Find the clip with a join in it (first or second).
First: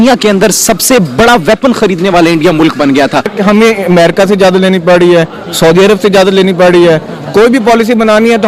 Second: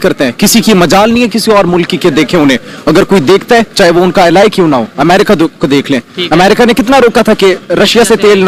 first